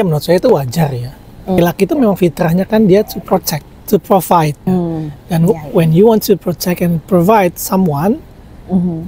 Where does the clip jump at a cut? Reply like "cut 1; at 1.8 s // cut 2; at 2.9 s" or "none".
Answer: cut 1; at 1.6 s